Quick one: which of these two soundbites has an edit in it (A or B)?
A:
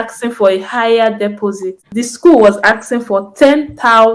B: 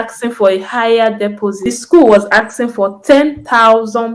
B